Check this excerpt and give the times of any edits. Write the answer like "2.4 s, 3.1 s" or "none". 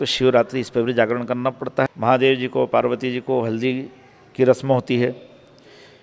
1.9 s